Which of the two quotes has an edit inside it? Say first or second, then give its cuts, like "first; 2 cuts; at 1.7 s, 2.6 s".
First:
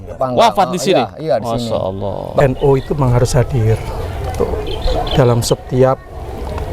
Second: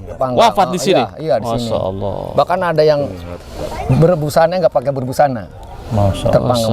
first; 1 cut; at 2.4 s